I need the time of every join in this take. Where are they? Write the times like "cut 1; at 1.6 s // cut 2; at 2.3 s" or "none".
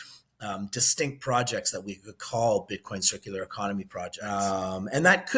cut 1; at 4.2 s